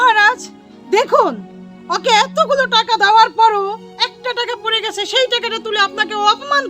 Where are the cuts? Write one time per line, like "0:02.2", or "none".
none